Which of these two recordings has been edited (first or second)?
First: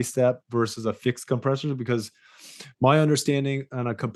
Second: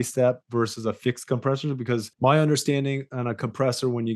second